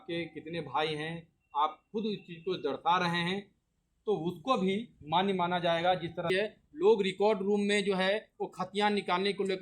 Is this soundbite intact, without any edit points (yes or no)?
no